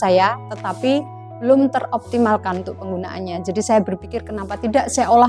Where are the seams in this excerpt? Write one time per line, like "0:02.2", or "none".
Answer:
none